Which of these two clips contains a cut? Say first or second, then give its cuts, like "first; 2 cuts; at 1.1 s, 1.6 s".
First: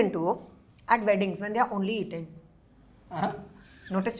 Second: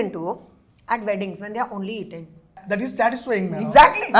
second; 1 cut; at 2.6 s